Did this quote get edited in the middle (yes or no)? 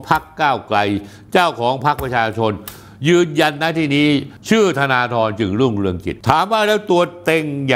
yes